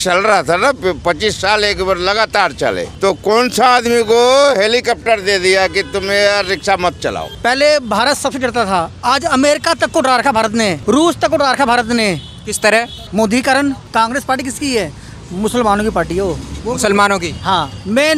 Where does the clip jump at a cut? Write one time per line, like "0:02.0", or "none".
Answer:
0:02.9
0:07.3
0:10.8
0:13.0
0:13.8
0:16.5